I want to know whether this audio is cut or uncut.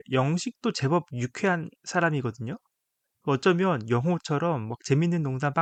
uncut